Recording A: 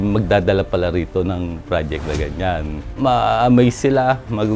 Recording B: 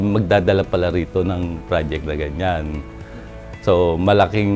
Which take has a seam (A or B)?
A